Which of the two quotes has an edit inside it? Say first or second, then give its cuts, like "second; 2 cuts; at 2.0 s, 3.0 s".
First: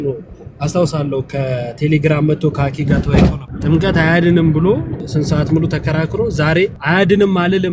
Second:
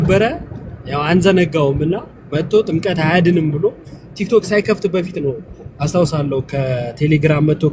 first; 3 cuts; at 3.5 s, 5.0 s, 6.8 s